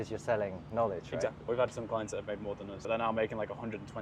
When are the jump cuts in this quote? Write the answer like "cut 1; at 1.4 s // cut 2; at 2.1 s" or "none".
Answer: cut 1; at 1.4 s // cut 2; at 2.7 s